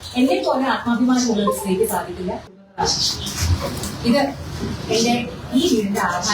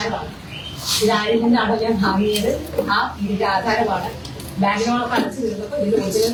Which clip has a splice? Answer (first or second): first